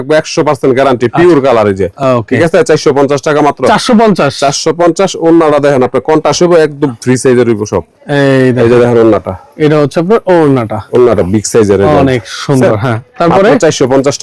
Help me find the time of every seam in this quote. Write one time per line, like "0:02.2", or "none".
none